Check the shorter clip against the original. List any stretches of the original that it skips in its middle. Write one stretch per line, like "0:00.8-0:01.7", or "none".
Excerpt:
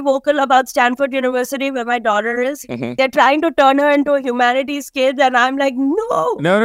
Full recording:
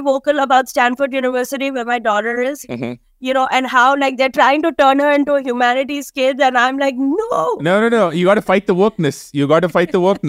0:02.9-0:04.1